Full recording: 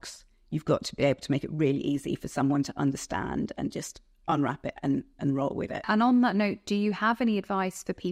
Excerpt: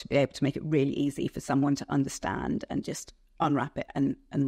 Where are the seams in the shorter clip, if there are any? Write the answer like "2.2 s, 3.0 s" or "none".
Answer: none